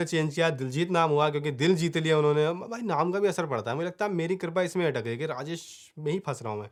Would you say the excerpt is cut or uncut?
uncut